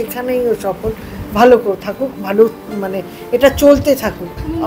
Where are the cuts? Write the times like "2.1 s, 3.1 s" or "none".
none